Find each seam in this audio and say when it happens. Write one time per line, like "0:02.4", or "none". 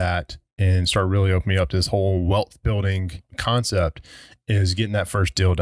0:03.3